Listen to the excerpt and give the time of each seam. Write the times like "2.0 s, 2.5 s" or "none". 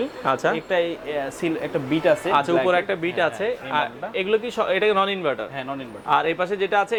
none